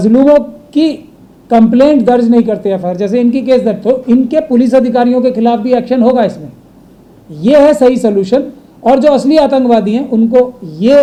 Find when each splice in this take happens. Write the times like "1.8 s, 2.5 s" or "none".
none